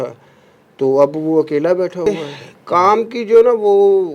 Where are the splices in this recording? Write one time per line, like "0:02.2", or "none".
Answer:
0:02.1